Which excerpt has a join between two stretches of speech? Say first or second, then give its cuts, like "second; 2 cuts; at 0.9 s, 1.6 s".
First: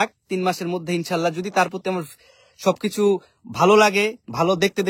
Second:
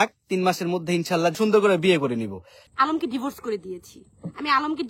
second; 2 cuts; at 1.4 s, 2.6 s